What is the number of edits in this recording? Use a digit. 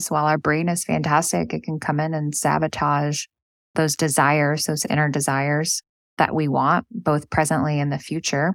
0